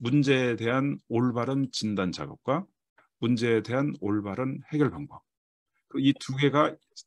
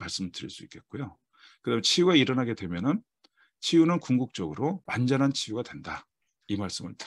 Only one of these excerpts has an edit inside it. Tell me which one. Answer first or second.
second